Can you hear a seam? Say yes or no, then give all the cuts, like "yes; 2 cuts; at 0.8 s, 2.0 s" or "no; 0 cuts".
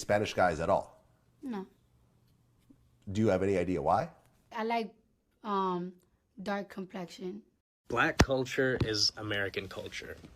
yes; 2 cuts; at 4.5 s, 7.8 s